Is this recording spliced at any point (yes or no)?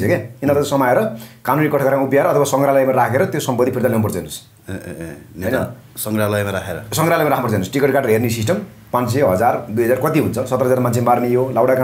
no